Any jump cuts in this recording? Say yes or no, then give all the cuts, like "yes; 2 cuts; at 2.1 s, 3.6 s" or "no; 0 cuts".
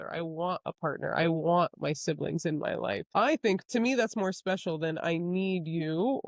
no; 0 cuts